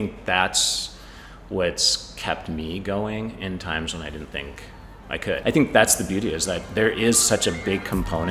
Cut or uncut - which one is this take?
cut